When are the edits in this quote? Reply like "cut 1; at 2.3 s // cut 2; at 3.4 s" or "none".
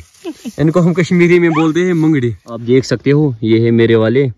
cut 1; at 2.5 s